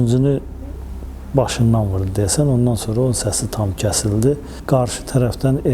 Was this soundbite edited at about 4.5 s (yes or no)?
yes